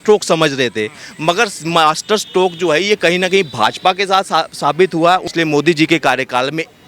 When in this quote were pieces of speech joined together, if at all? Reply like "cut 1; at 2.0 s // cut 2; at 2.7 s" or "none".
cut 1; at 5.3 s